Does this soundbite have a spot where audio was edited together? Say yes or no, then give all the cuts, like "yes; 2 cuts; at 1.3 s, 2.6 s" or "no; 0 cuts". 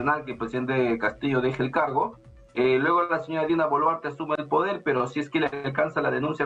no; 0 cuts